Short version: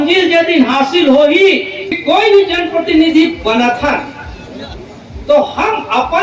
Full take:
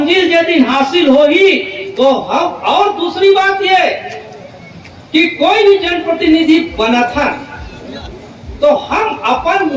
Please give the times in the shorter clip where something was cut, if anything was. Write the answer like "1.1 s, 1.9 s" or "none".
1.9 s